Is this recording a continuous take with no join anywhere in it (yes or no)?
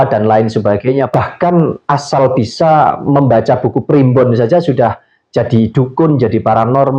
no